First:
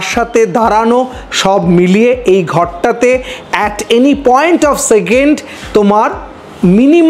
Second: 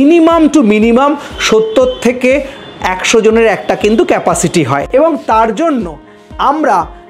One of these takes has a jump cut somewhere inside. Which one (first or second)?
second